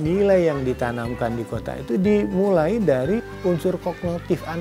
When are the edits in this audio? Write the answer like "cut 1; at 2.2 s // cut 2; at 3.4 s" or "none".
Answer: cut 1; at 3.3 s